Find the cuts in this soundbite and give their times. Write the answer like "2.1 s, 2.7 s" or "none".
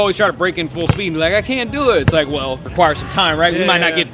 2.6 s

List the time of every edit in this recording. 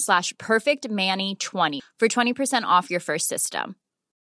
none

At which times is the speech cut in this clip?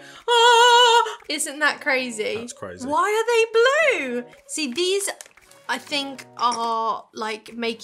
1.1 s, 4.4 s

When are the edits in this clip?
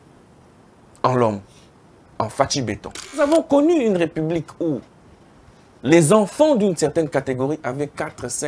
3.2 s

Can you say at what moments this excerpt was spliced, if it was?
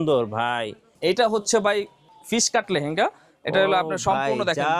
0.9 s

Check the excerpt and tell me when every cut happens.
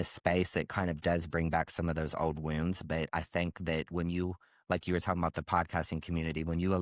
none

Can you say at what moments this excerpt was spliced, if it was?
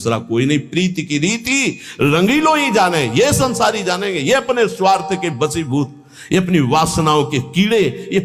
none

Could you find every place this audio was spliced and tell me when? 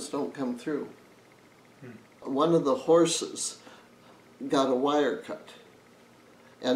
2.2 s

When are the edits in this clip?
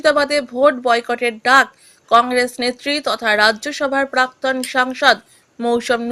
none

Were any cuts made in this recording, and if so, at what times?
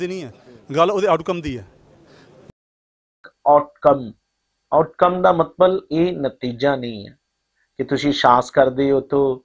3.0 s

